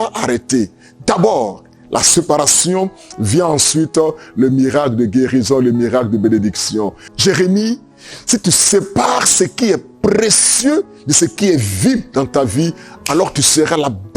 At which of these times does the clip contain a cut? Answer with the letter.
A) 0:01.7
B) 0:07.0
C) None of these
B